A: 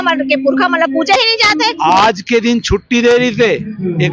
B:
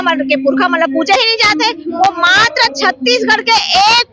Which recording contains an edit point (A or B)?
A